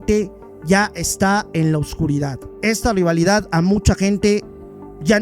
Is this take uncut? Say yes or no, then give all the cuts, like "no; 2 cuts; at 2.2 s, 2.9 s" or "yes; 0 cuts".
yes; 0 cuts